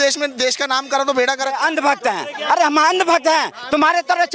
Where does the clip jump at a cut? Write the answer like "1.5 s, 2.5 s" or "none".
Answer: 1.6 s